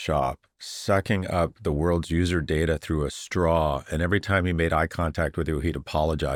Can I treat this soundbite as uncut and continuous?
yes; 0 cuts

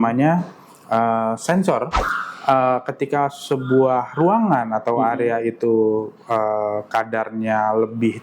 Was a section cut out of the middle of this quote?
yes; 1 cut; at 2.0 s

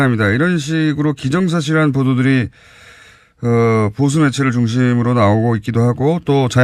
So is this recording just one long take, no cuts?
no; 1 cut; at 1.2 s

